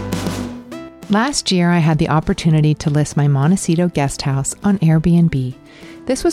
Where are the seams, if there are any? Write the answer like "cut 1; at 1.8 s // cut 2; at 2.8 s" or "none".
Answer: cut 1; at 0.9 s